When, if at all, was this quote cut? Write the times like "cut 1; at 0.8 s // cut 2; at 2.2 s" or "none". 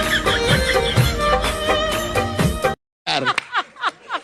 cut 1; at 2.9 s

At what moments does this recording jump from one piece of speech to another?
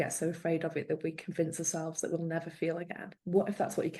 cut 1; at 3.1 s

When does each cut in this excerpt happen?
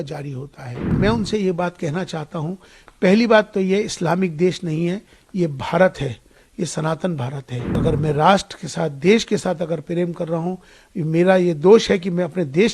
cut 1; at 0.9 s // cut 2; at 7.8 s

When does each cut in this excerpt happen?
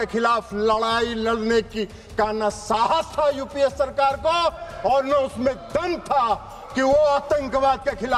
none

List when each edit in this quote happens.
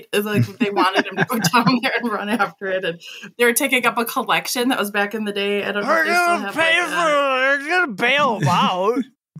none

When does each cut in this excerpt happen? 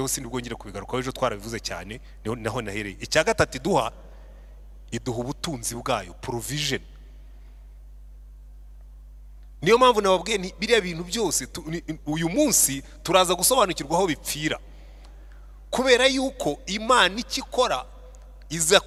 none

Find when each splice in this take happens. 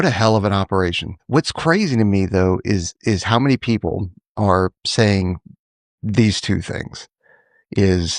cut 1; at 1.1 s

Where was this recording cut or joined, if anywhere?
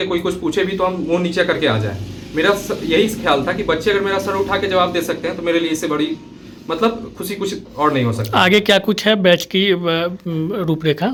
none

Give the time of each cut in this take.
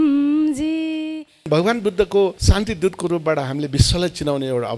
cut 1; at 1.4 s

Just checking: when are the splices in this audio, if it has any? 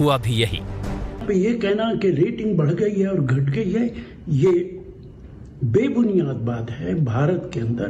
none

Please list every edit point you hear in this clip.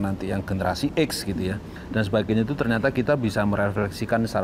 cut 1; at 1.7 s

